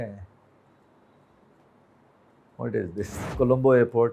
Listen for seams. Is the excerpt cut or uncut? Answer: cut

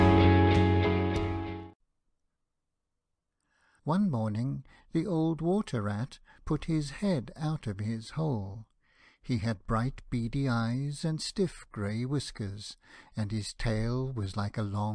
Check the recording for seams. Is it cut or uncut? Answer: uncut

